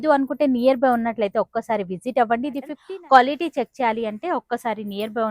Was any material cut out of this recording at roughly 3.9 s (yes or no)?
no